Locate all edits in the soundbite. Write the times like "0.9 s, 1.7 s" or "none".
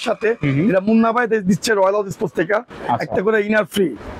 2.8 s